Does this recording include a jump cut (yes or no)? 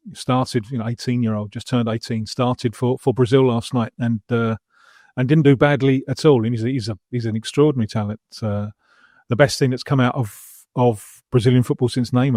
no